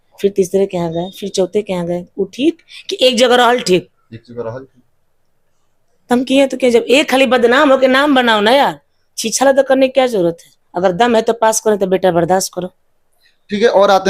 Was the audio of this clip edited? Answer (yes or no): no